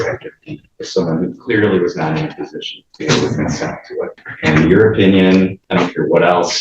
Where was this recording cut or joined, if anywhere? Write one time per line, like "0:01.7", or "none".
0:04.2
0:05.6